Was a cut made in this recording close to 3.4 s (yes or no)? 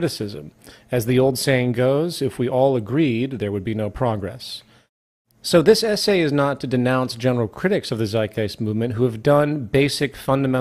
yes